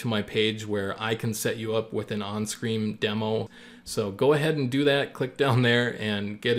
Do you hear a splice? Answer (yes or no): yes